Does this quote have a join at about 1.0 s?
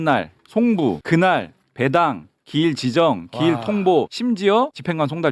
yes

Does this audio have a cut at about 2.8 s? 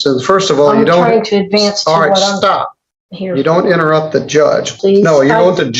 no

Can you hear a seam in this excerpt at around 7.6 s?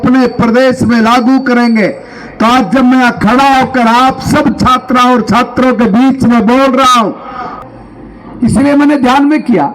yes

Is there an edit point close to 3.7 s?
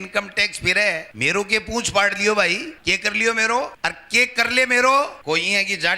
yes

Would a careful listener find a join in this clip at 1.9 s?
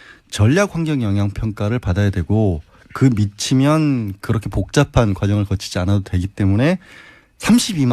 no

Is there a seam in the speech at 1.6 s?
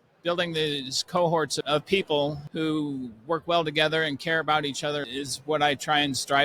yes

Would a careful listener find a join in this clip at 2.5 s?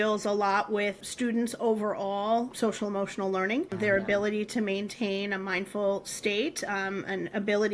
yes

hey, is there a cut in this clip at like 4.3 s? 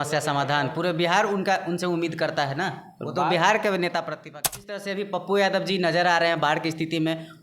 yes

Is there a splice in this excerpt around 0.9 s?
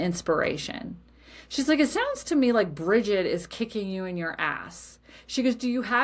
no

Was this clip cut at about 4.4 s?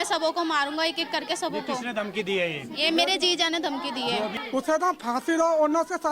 yes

